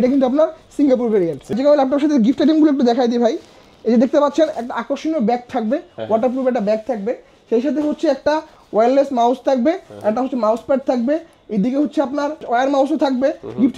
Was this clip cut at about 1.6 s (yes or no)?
yes